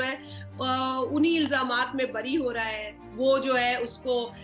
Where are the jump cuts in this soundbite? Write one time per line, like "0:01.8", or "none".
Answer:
none